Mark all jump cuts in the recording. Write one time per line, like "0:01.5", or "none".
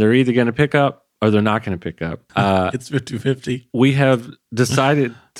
0:02.2